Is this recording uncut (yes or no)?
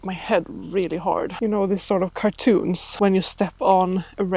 no